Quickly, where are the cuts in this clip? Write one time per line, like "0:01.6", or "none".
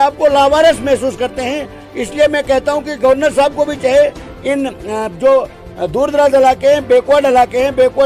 none